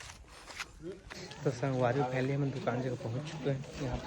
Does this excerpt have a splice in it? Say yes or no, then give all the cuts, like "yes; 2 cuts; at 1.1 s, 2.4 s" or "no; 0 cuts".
yes; 1 cut; at 1.1 s